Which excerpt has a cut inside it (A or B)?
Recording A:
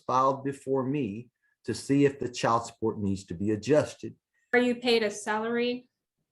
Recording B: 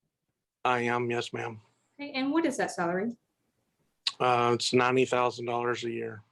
A